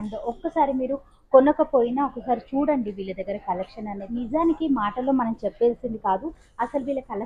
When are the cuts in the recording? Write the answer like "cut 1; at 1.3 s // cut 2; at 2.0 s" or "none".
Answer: cut 1; at 4.1 s

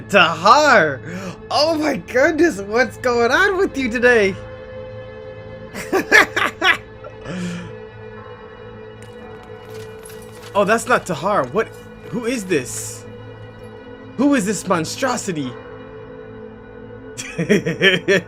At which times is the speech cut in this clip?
none

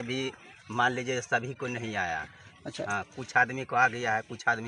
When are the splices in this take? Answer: none

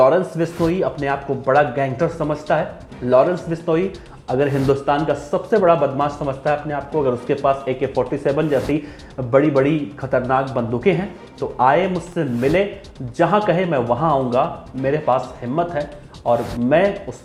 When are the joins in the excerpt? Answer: none

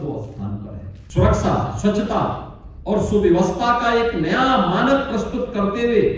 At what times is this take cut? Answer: cut 1; at 1.0 s

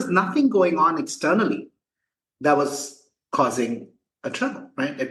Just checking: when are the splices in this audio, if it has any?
none

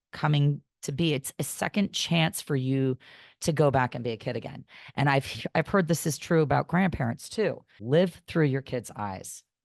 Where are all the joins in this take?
cut 1; at 7.7 s

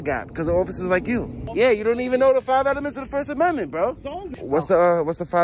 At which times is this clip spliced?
cut 1; at 1.4 s // cut 2; at 4.4 s

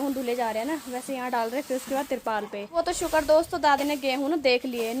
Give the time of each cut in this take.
cut 1; at 2.8 s

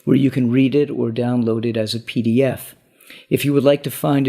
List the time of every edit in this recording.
cut 1; at 1.9 s

